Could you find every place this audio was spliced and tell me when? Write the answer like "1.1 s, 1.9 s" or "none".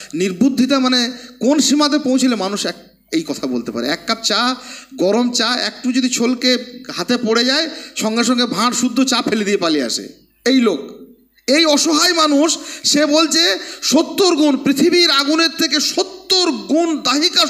none